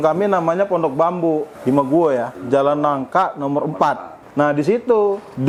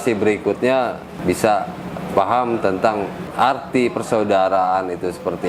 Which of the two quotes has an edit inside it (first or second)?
second